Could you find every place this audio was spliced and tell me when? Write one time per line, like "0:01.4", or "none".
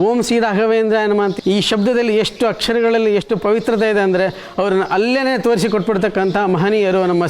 0:01.3